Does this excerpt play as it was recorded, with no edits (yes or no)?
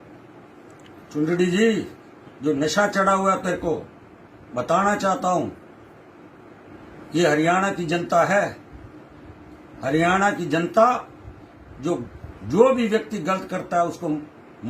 yes